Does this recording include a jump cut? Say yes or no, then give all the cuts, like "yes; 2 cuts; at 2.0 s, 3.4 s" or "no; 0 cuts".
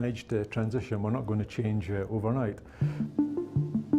yes; 1 cut; at 2.7 s